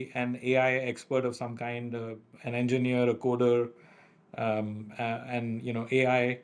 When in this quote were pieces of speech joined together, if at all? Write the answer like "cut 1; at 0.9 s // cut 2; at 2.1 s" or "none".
none

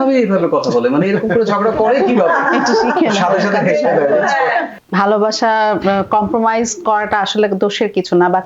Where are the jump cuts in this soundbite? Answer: cut 1; at 4.8 s

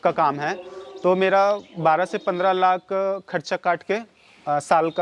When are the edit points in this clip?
none

